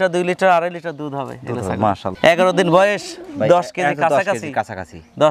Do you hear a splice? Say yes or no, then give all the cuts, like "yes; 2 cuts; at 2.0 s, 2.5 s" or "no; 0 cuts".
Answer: yes; 1 cut; at 2.2 s